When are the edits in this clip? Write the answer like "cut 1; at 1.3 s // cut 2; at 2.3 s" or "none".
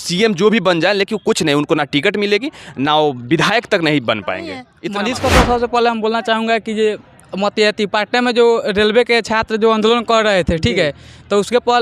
cut 1; at 4.7 s